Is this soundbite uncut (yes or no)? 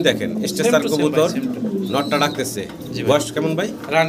yes